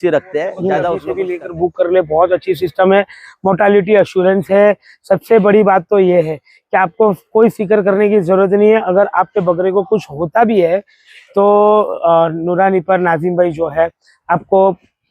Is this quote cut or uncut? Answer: cut